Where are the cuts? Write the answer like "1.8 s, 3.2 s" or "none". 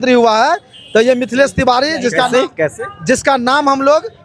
none